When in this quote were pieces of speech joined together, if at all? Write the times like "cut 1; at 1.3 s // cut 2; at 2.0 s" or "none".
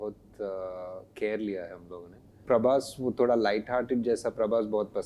cut 1; at 2.4 s